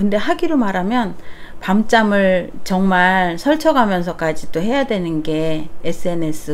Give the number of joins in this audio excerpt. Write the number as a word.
zero